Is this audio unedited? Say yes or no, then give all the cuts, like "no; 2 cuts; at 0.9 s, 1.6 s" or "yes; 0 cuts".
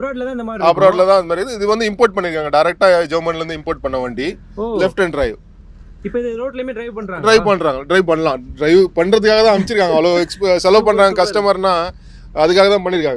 yes; 0 cuts